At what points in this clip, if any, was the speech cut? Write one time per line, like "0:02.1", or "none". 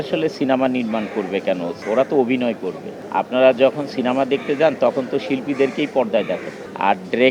none